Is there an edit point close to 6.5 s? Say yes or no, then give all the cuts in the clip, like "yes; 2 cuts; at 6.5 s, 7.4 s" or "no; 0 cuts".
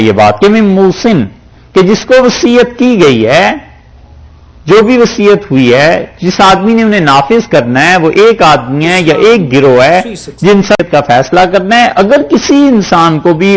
no; 1 cut; at 10.8 s